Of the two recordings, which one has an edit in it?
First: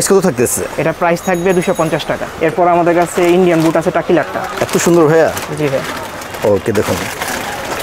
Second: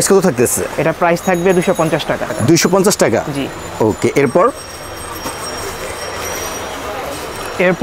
first; 1 cut; at 2.4 s

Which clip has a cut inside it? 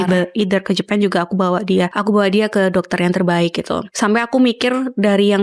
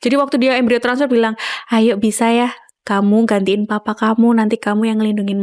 first; 2 cuts; at 1.9 s, 3.8 s

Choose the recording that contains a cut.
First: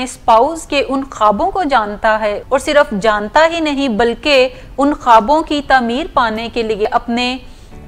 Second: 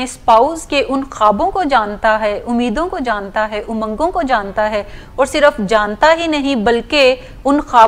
first; 2 cuts; at 2.4 s, 6.9 s

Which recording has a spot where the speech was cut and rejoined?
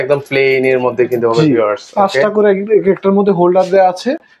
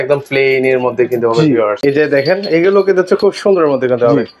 second; 1 cut; at 1.8 s

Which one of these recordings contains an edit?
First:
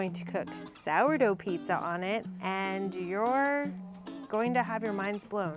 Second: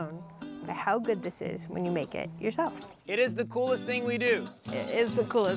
second; 2 cuts; at 2.9 s, 4.6 s

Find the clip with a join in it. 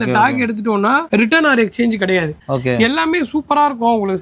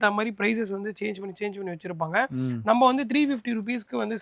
first; 2 cuts; at 1.0 s, 2.4 s

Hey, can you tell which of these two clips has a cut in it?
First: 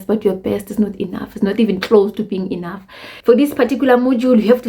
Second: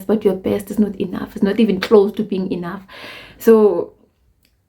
first; 1 cut; at 3.2 s

